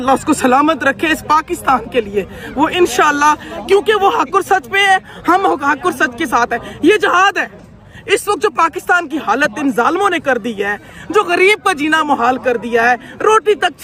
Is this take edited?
no; 0 cuts

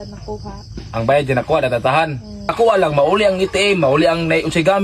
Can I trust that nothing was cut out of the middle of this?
no; 1 cut; at 2.5 s

